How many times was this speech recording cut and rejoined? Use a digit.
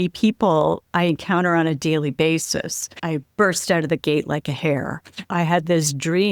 2